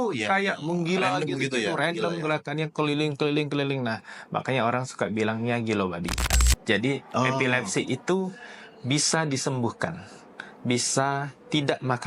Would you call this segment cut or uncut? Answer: cut